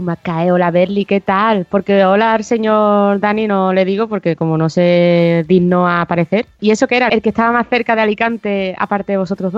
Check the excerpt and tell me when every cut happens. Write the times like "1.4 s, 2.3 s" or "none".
6.6 s